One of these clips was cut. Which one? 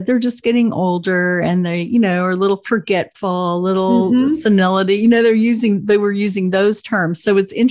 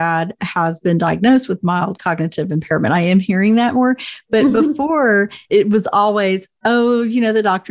second; 1 cut; at 5.4 s

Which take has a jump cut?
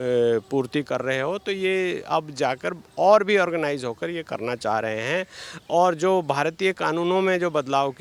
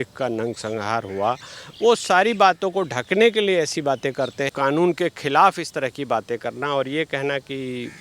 second; 1 cut; at 4.5 s

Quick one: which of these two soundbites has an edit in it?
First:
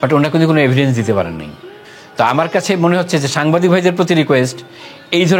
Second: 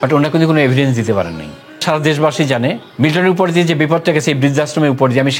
second; 2 cuts; at 1.8 s, 2.9 s

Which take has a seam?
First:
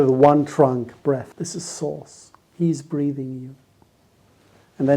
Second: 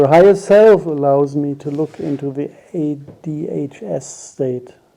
first; 1 cut; at 1.3 s

